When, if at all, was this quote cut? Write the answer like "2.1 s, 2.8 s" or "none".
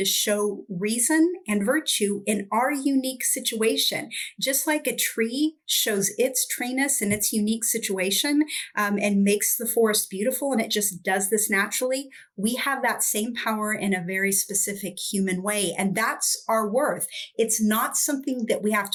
none